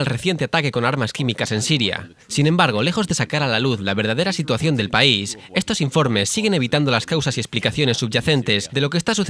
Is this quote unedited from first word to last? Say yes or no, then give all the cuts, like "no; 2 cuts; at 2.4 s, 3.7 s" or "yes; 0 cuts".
no; 1 cut; at 5.7 s